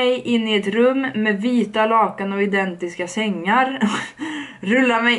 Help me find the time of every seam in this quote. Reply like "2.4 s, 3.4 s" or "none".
none

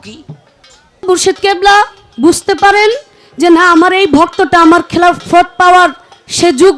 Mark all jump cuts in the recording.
1.0 s

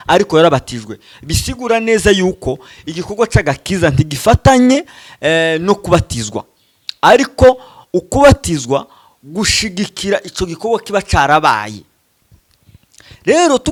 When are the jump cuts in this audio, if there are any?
none

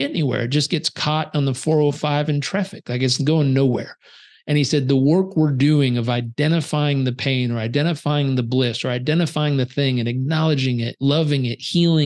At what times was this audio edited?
none

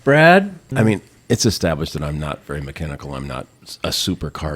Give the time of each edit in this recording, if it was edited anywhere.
0.9 s

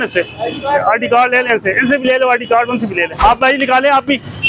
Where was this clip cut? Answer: 3.2 s

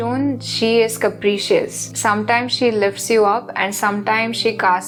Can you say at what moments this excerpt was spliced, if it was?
none

